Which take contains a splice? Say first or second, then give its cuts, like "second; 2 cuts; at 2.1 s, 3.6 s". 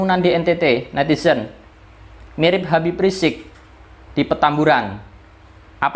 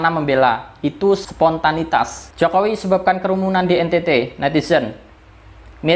second; 1 cut; at 2.2 s